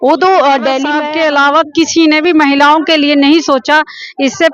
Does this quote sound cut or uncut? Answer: cut